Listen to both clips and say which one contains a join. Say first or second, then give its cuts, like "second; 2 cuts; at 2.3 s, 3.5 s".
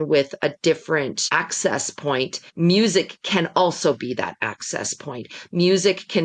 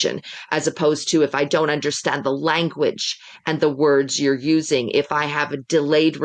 first; 2 cuts; at 1.2 s, 2.4 s